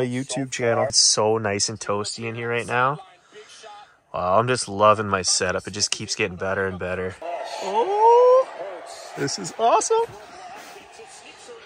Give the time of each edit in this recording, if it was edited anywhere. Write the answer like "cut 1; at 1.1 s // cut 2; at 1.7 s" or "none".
none